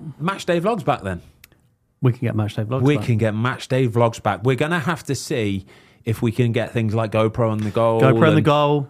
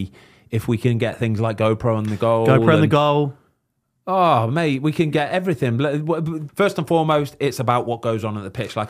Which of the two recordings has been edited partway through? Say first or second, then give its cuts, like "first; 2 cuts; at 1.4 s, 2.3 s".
second; 1 cut; at 6.4 s